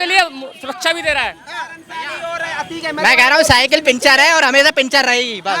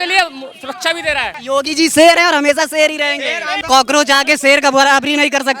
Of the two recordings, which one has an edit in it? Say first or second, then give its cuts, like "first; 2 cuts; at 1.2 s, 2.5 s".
second; 2 cuts; at 1.3 s, 3.6 s